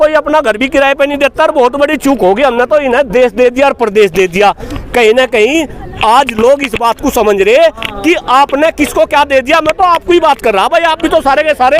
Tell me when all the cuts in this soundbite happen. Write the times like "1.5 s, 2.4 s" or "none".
none